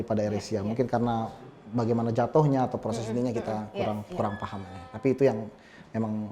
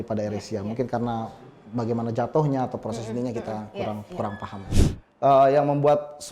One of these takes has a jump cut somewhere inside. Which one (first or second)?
second